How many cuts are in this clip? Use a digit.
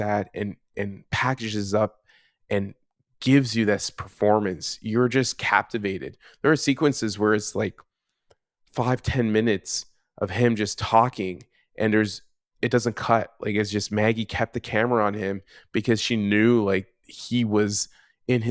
0